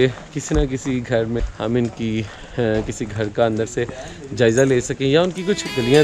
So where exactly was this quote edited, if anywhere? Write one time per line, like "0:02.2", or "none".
0:01.5